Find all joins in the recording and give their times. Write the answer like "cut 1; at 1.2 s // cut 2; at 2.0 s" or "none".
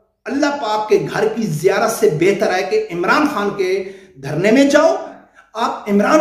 cut 1; at 5.2 s